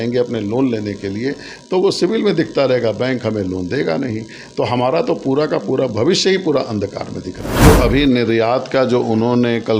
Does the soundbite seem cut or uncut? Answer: cut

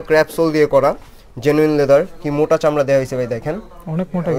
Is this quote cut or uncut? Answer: uncut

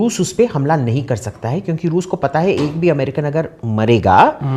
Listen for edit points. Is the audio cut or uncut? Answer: uncut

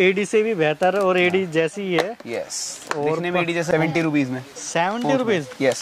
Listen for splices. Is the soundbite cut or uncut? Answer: cut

